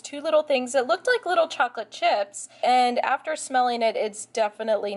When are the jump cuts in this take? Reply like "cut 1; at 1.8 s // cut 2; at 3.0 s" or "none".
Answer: cut 1; at 2.5 s